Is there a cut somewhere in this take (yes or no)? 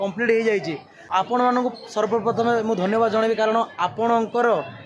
yes